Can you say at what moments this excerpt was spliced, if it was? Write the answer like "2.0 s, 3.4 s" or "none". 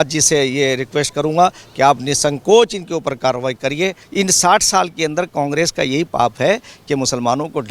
4.0 s